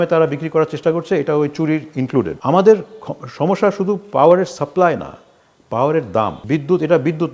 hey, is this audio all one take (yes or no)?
no